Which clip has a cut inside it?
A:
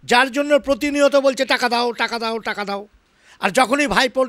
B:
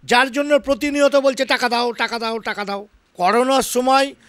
B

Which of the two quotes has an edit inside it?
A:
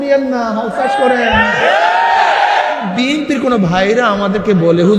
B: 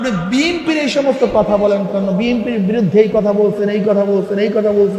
A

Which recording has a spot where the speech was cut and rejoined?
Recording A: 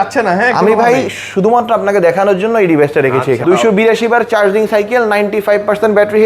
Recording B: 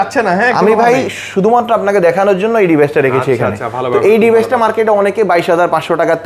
A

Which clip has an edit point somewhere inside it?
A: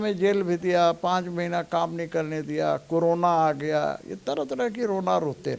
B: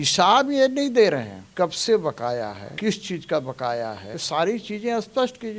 B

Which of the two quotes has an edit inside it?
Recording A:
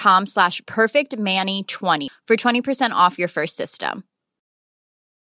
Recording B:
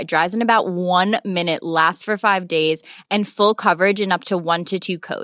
A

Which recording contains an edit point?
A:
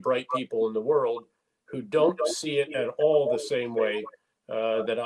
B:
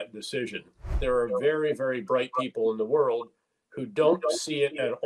B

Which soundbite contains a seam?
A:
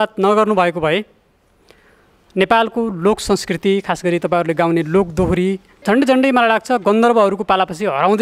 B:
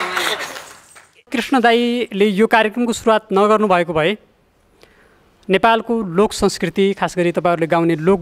B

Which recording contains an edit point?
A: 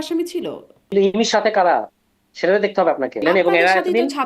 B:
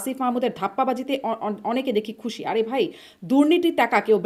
A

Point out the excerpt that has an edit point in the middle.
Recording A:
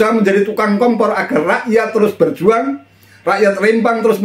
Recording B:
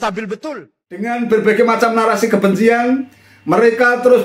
B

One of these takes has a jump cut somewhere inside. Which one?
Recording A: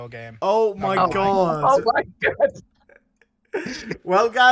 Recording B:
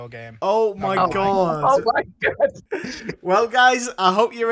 B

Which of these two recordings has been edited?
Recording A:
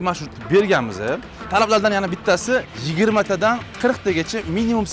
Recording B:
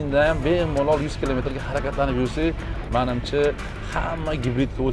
A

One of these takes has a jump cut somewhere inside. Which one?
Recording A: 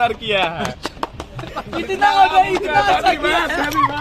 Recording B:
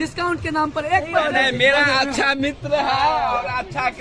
B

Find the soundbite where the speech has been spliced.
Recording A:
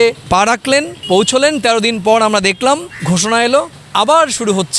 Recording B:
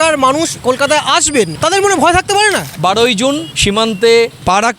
B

